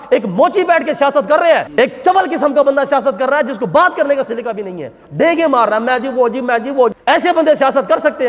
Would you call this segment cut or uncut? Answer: cut